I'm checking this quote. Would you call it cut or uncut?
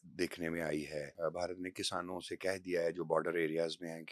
cut